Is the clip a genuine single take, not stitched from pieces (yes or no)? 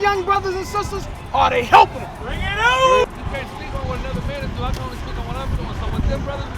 no